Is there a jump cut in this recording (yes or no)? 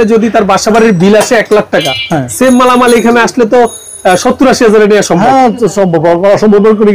no